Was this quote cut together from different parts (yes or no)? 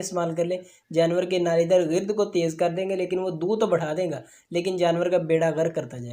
no